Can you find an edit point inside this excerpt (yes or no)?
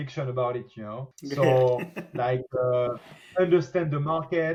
no